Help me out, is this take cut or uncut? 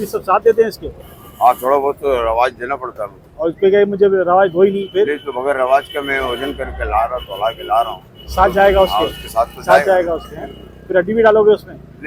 uncut